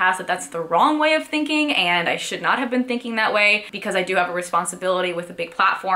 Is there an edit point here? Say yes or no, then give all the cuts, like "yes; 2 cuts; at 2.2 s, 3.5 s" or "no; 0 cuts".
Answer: yes; 1 cut; at 3.7 s